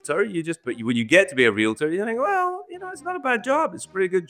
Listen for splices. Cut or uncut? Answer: uncut